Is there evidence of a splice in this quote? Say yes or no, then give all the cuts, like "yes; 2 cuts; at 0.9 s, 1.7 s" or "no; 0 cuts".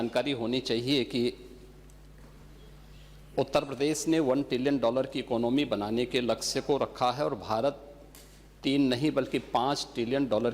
no; 0 cuts